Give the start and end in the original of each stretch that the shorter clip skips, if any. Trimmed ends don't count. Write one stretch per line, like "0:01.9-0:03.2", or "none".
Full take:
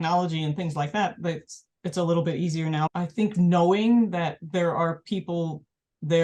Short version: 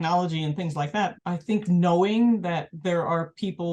0:01.2-0:02.9